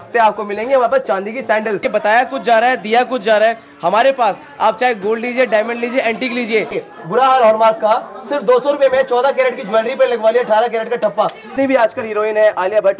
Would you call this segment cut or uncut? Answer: cut